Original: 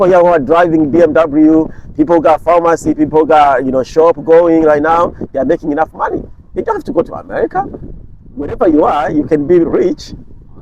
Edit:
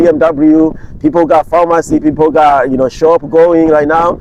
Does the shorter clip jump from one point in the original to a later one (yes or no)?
no